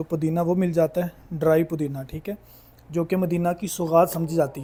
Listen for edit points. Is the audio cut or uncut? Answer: uncut